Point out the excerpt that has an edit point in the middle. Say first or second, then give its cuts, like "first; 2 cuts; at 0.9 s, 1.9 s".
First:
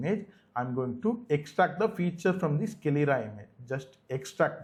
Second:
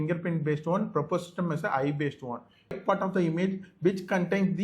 second; 1 cut; at 2.8 s